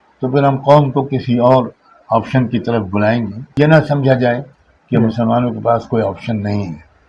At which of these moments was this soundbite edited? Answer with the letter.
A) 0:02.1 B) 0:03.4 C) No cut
B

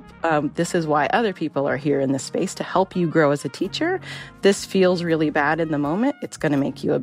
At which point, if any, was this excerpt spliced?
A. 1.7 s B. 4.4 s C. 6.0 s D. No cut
D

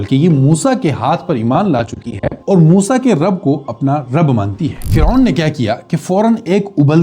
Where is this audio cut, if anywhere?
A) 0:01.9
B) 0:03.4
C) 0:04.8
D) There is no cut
C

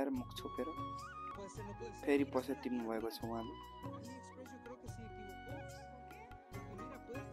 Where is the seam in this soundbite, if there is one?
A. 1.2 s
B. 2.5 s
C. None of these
A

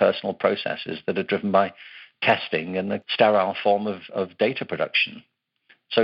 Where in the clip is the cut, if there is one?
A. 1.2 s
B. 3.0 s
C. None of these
B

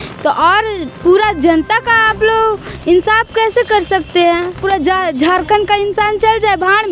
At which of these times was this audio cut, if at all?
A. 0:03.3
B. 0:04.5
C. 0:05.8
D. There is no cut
B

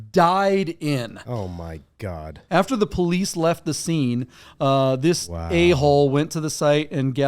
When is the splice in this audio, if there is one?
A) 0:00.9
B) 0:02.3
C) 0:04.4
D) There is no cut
B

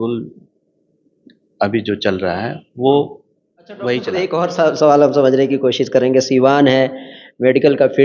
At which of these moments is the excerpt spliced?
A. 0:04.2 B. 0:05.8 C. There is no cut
A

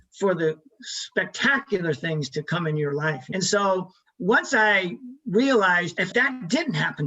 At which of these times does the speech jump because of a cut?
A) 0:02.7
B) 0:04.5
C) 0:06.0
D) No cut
C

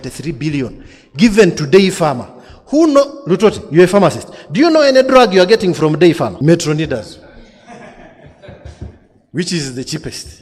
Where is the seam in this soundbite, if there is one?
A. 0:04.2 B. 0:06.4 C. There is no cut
B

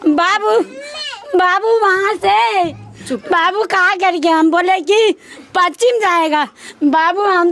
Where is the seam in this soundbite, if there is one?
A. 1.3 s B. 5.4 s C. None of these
C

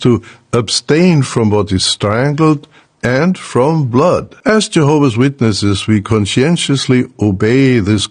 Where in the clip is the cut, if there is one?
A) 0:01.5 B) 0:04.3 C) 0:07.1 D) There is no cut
B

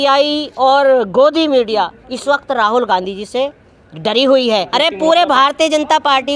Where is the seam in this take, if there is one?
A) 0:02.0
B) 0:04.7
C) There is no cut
B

